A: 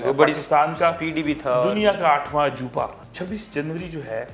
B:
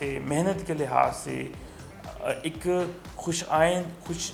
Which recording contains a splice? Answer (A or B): A